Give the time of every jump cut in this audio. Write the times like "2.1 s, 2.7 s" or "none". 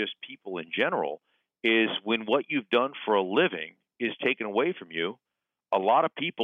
none